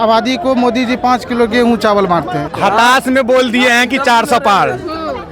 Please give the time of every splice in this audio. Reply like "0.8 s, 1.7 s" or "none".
2.5 s

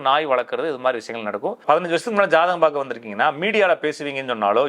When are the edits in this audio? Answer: 1.6 s

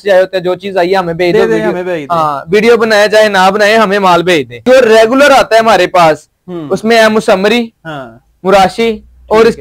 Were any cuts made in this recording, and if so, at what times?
4.5 s

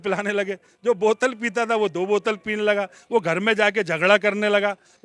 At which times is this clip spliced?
none

